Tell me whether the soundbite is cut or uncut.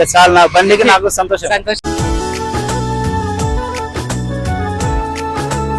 cut